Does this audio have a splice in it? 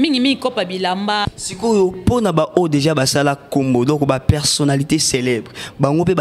yes; 1 cut; at 1.2 s

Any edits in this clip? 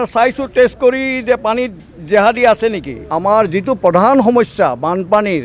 yes; 1 cut; at 3.0 s

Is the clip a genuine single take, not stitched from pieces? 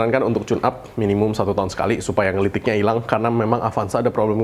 yes; 0 cuts

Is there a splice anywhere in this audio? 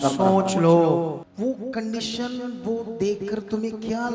yes; 1 cut; at 1.2 s

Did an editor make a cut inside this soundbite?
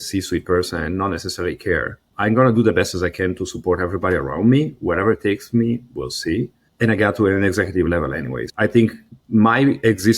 yes; 4 cuts; at 2.0 s, 6.6 s, 8.5 s, 9.1 s

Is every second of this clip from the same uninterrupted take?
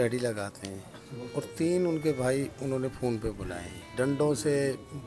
no; 1 cut; at 3.9 s

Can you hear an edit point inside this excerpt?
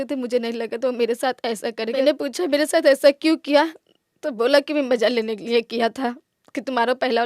yes; 1 cut; at 2.0 s

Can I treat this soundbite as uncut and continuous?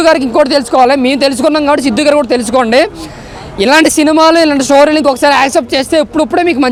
yes; 0 cuts

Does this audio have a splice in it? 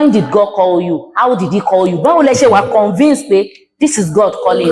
no; 0 cuts

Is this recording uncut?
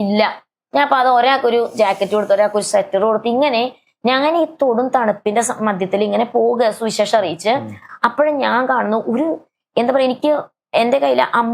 yes; 0 cuts

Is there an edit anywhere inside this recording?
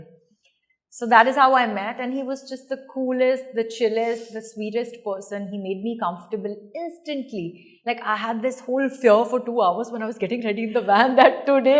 no; 0 cuts

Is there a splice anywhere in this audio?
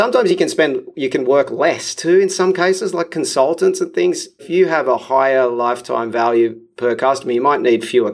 yes; 1 cut; at 4.4 s

